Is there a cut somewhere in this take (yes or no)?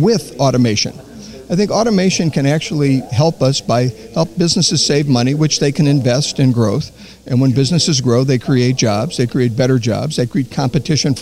no